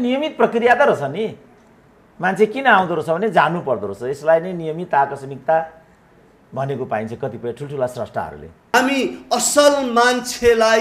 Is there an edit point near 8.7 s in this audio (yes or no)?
yes